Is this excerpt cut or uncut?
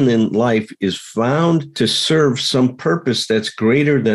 cut